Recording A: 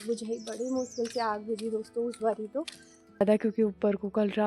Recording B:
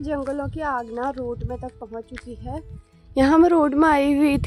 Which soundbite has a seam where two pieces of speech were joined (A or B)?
A